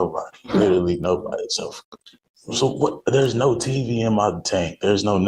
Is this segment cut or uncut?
uncut